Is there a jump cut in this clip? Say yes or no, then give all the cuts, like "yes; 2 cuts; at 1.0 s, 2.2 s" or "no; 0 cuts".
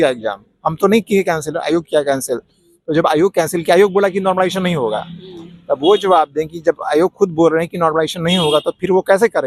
no; 0 cuts